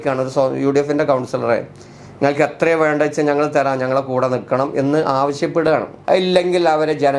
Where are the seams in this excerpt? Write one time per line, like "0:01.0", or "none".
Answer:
0:05.9